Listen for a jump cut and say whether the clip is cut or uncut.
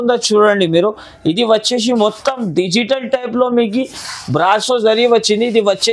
uncut